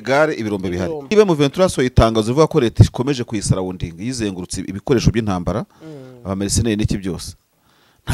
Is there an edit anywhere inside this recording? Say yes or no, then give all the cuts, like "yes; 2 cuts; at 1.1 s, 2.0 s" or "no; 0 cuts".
yes; 1 cut; at 1.1 s